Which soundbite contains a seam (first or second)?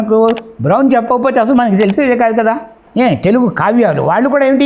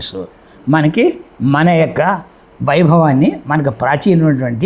first